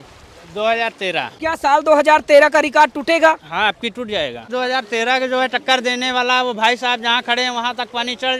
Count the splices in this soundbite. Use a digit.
2